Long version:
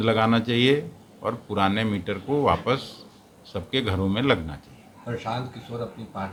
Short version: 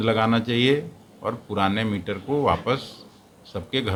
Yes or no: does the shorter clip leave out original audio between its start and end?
no